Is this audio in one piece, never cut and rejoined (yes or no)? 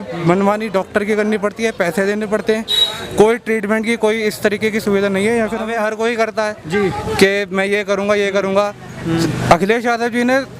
no